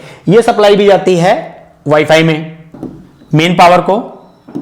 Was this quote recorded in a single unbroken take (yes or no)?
no